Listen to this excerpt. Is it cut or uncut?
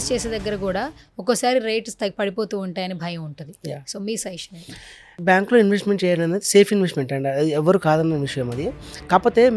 uncut